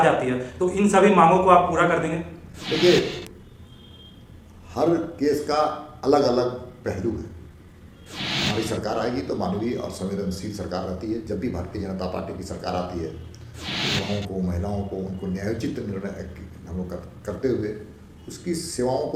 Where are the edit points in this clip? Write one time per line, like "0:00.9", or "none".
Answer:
none